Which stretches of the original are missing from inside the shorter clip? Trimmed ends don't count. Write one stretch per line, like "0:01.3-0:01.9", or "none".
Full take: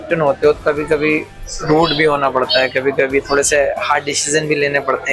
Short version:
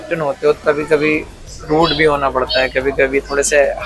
none

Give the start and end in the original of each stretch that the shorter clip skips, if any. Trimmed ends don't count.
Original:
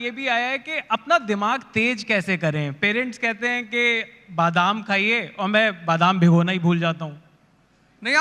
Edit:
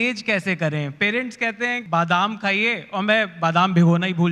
0:03.6-0:04.3

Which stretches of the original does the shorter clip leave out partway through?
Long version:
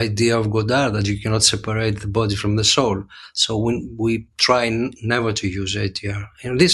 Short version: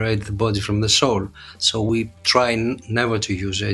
0:03.6-0:04.0

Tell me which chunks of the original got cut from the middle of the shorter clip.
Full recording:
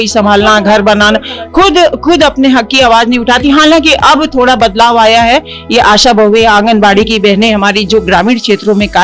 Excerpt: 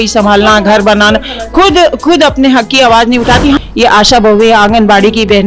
0:03.6-0:05.5

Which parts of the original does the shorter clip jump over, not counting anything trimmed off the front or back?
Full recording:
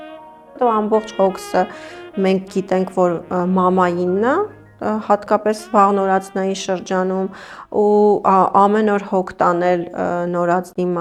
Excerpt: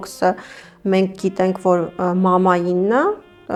none

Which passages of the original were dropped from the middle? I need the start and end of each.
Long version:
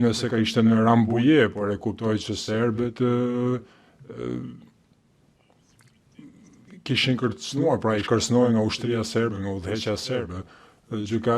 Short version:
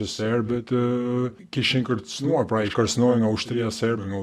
0:03.7-0:06.7

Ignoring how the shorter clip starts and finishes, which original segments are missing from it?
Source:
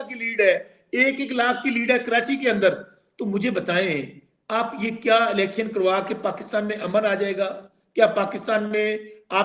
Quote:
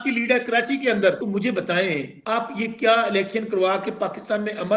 0:02.8-0:03.2
0:04.1-0:04.4

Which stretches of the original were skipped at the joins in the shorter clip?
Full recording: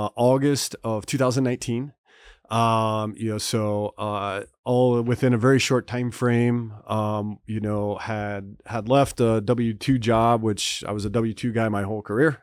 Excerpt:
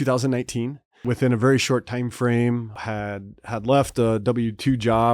0:02.2-0:05.0
0:06.8-0:08.0

